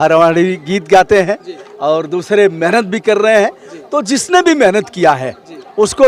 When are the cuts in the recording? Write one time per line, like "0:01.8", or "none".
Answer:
none